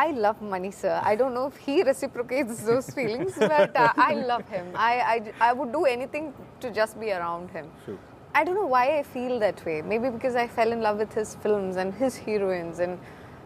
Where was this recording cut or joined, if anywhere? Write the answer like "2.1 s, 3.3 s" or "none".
none